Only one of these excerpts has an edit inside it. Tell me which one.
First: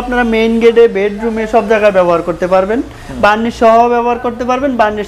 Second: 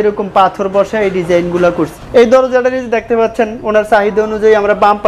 second; 1 cut; at 2.0 s

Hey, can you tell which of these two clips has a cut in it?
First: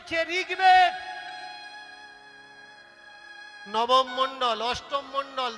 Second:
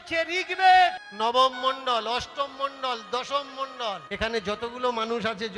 second; 2 cuts; at 1.1 s, 4.1 s

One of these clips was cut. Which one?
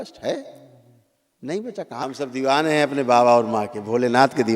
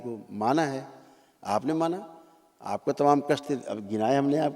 first; 1 cut; at 2.0 s

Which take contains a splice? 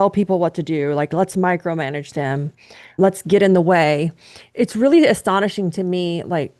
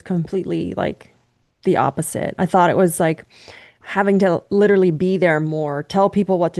first; 1 cut; at 4.4 s

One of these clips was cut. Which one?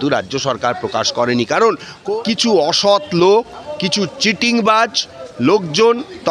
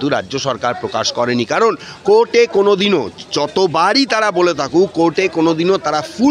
first; 1 cut; at 2.0 s

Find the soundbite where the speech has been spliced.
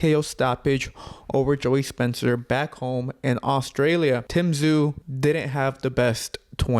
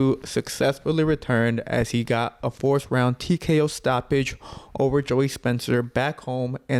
first; 2 cuts; at 4.3 s, 5.1 s

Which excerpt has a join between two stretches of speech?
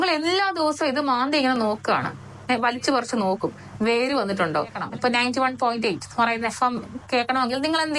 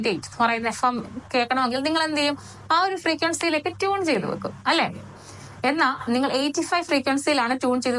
first; 1 cut; at 4.8 s

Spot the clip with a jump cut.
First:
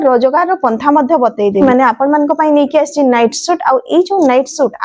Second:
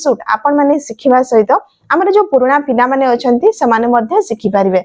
first; 1 cut; at 1.5 s

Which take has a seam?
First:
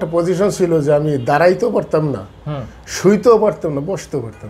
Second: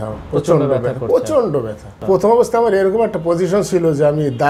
second; 1 cut; at 2.0 s

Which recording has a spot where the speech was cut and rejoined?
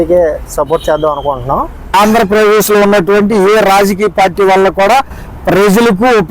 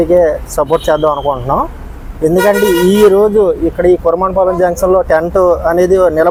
first; 1 cut; at 1.9 s

